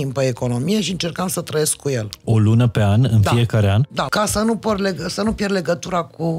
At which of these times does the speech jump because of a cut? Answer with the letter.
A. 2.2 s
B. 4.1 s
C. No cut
B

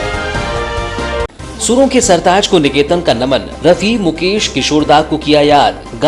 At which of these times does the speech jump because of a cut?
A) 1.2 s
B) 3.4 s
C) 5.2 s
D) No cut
A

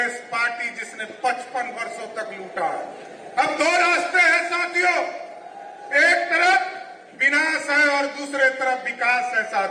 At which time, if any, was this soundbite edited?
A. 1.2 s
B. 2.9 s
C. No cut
C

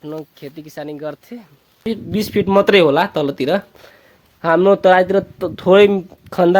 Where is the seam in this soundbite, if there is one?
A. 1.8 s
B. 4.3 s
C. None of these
A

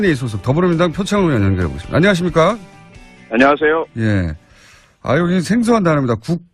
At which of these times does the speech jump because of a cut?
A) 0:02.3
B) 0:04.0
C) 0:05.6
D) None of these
D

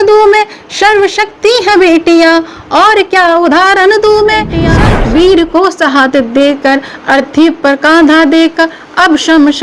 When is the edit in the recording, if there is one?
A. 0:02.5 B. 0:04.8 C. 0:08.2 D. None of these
B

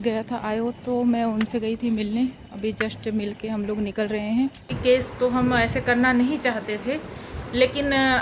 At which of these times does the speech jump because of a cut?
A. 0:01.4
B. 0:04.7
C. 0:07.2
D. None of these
B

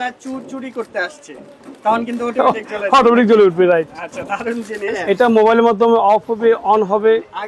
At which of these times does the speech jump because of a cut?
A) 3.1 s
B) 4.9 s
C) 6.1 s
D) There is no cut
B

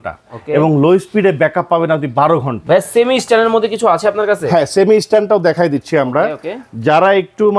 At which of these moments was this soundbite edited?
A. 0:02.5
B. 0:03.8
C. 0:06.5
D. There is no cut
A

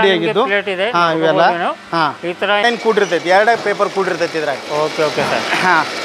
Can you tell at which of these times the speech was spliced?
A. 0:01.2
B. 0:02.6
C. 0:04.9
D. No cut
B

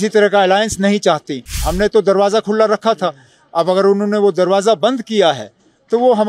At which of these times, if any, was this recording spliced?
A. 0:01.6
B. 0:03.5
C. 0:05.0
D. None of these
A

